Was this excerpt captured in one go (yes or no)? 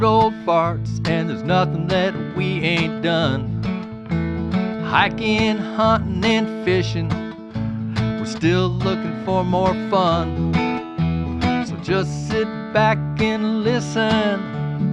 yes